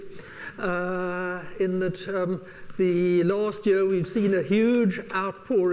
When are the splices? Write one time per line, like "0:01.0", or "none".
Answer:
none